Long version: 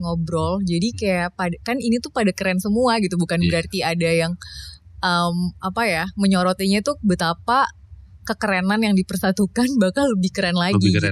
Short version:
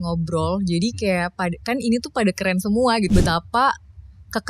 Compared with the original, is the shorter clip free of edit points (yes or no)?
no